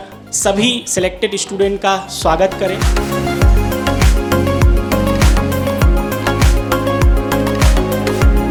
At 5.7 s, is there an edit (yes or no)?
no